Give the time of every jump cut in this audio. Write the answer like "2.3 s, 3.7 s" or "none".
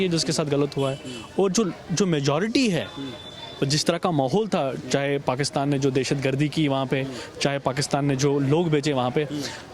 none